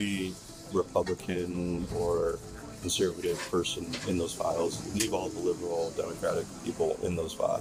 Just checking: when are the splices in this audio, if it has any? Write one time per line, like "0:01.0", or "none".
none